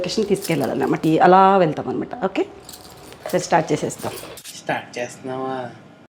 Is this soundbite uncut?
no; 1 cut; at 1.0 s

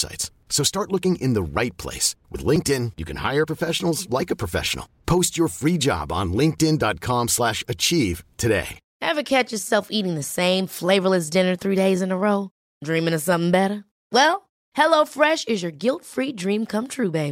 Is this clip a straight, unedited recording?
no; 1 cut; at 8.8 s

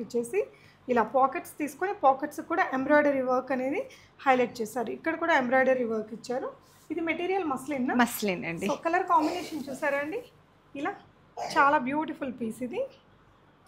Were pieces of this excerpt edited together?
no; 0 cuts

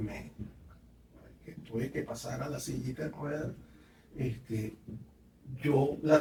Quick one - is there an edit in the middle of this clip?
no; 0 cuts

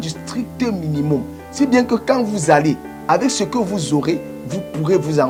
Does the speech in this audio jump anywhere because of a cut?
no; 0 cuts

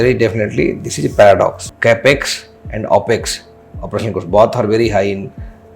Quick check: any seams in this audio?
yes; 1 cut; at 1.7 s

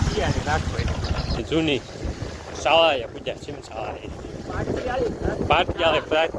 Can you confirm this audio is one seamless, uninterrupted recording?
no; 1 cut; at 1.4 s

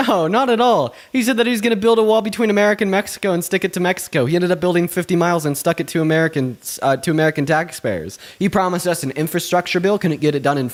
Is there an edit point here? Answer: no; 0 cuts

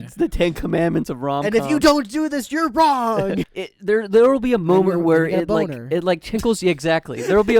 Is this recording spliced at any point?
yes; 1 cut; at 3.5 s

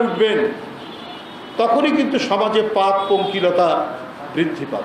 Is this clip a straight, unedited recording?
yes; 0 cuts

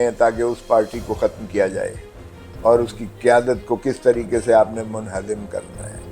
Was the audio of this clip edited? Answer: no; 0 cuts

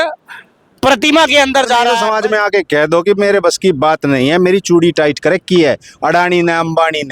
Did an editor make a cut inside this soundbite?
yes; 1 cut; at 2.0 s

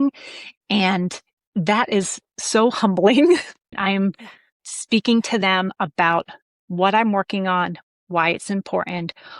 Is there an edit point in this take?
yes; 1 cut; at 3.8 s

